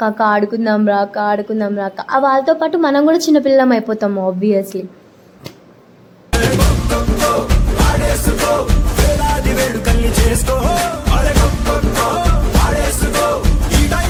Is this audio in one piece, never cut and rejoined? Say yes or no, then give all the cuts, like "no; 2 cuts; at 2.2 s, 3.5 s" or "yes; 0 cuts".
yes; 0 cuts